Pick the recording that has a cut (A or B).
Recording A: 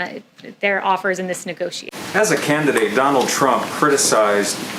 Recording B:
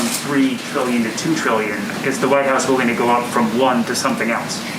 A